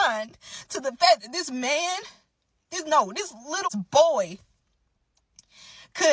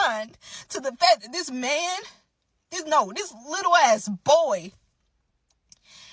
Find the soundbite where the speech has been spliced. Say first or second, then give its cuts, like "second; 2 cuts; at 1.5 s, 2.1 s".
first; 1 cut; at 3.7 s